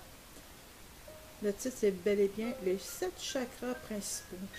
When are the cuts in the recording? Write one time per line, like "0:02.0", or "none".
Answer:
0:03.2